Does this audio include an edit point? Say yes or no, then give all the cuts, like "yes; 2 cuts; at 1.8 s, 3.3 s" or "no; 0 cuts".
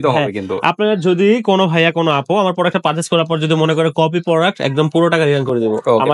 no; 0 cuts